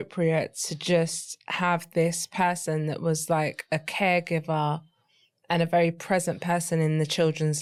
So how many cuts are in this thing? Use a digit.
0